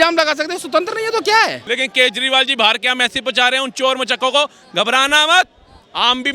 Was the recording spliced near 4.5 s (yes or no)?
no